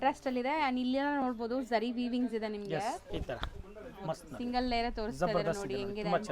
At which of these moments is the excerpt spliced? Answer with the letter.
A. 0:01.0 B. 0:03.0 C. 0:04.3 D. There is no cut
B